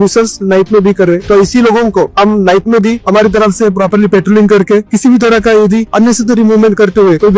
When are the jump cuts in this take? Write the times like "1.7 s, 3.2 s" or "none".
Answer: 4.9 s